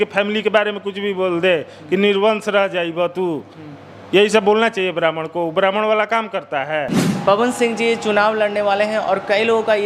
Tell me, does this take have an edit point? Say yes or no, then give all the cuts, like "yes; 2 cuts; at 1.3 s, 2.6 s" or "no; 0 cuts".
yes; 1 cut; at 7.0 s